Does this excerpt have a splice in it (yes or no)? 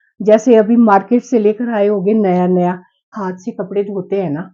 yes